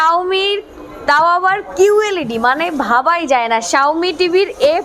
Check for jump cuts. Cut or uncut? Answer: uncut